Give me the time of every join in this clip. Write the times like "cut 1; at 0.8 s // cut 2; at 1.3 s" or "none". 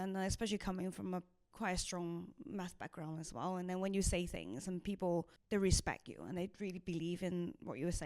cut 1; at 1.4 s // cut 2; at 5.4 s